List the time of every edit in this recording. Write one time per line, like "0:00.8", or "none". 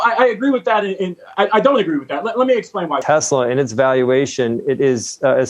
0:03.0